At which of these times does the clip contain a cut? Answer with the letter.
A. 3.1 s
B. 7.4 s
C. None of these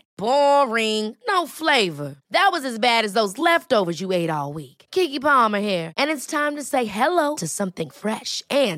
C